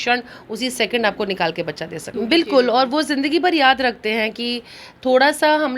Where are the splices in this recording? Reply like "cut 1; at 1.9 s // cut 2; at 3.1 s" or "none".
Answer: cut 1; at 2.1 s